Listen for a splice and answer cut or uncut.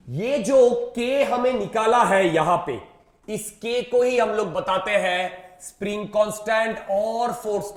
uncut